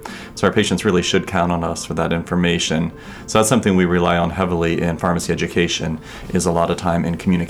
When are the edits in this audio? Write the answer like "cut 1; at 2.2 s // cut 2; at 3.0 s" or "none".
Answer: none